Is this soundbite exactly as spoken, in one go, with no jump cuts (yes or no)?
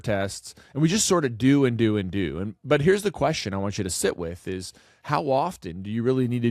yes